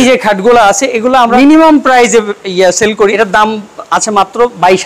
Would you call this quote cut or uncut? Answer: cut